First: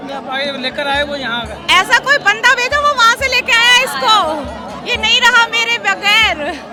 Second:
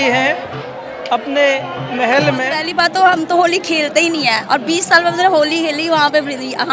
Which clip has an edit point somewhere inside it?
second; 1 cut; at 2.6 s

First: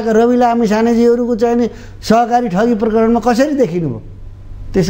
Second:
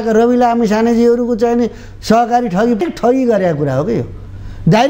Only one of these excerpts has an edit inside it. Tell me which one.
second; 1 cut; at 2.8 s

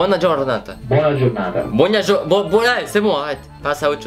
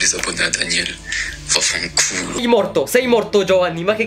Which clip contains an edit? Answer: second; 1 cut; at 2.4 s

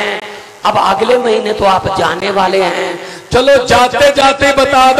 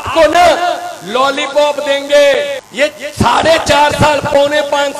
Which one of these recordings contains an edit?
second; 1 cut; at 2.6 s

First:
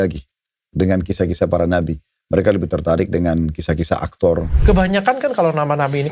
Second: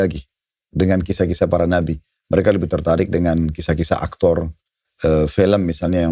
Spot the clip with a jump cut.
first; 1 cut; at 4.5 s

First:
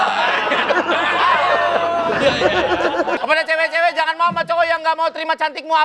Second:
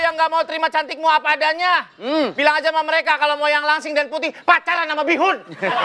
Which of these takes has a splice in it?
first; 1 cut; at 3.2 s

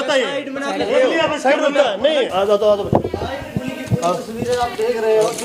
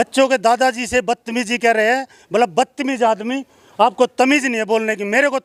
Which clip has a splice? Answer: first; 1 cut; at 2.2 s

